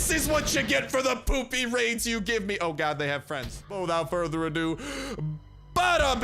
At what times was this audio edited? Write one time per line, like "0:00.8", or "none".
0:03.7